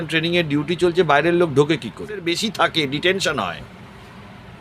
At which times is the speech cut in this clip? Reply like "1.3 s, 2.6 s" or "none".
2.3 s